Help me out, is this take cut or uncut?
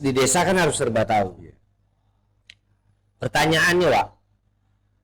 uncut